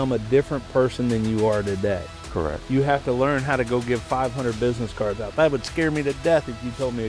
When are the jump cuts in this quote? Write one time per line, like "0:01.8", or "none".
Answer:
none